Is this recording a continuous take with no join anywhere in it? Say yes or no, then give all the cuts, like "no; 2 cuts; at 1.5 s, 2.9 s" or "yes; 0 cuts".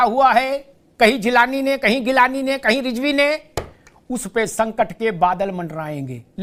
yes; 0 cuts